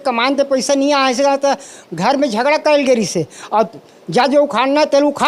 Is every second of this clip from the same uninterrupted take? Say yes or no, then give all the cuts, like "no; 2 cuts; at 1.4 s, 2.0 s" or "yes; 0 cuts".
yes; 0 cuts